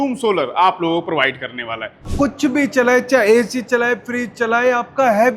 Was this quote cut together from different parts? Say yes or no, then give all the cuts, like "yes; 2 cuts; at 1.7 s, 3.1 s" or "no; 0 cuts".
yes; 1 cut; at 2.1 s